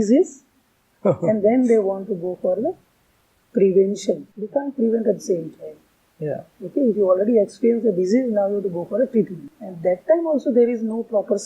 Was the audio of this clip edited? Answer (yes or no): yes